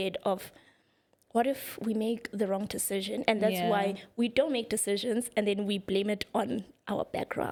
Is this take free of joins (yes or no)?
yes